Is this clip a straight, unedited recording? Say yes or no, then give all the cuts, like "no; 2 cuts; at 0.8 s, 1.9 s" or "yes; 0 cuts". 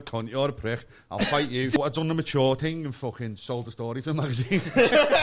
no; 1 cut; at 1.8 s